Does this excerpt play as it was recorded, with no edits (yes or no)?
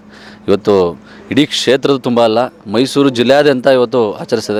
yes